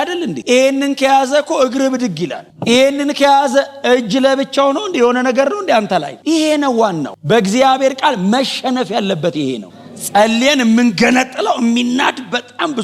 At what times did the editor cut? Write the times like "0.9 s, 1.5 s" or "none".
6.1 s, 9.7 s

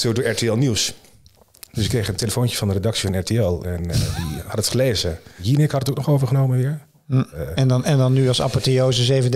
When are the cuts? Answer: 5.4 s, 7.4 s

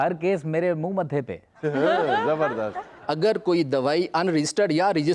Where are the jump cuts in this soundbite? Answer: 3.0 s

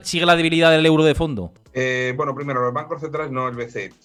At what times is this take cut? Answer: none

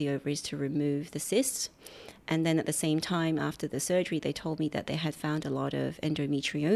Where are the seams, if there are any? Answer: none

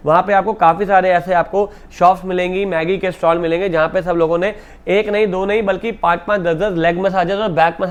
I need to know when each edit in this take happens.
none

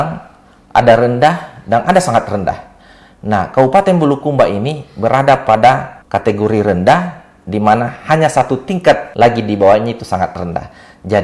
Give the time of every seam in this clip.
9.1 s

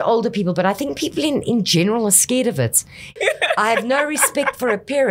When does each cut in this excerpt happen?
3.2 s

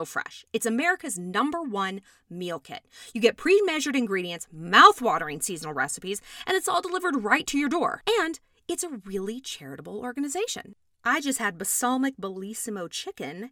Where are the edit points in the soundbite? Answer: 8.0 s

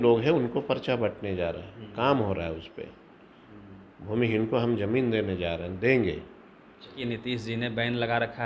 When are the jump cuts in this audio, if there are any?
7.0 s

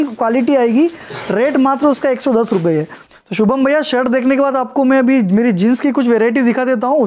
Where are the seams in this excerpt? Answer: 3.1 s

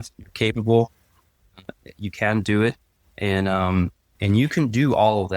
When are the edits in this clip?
4.2 s

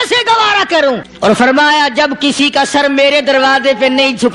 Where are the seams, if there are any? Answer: 1.1 s

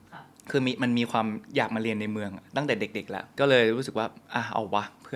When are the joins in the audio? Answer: 3.2 s

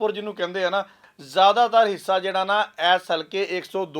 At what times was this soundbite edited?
1.1 s

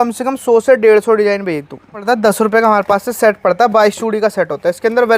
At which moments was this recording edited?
2.0 s

